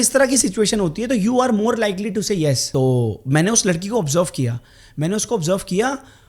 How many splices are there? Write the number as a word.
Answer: one